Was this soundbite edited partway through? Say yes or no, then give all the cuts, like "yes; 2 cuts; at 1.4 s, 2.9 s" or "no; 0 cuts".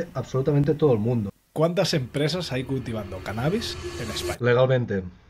yes; 2 cuts; at 1.3 s, 4.4 s